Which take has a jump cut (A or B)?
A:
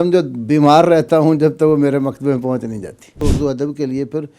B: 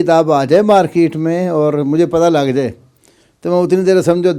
A